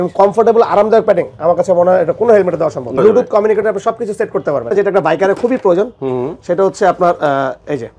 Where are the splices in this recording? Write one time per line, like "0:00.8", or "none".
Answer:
0:03.0
0:04.7